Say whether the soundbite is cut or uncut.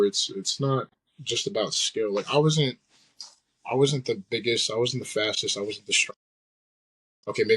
uncut